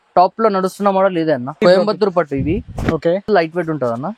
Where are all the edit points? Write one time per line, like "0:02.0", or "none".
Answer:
0:01.6
0:03.3